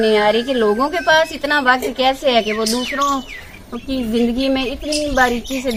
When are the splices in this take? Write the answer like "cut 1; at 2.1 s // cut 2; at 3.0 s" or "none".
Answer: none

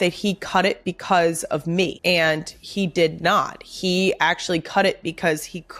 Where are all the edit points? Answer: cut 1; at 2.0 s

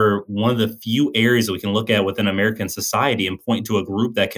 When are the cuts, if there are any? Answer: none

